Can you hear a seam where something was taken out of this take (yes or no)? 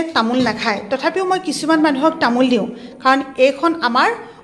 no